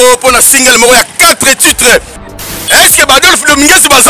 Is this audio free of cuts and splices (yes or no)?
no